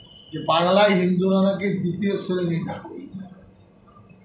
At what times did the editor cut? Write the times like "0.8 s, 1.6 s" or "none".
none